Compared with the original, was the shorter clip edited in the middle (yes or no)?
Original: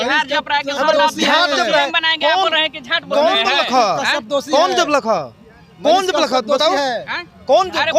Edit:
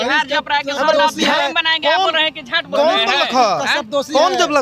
yes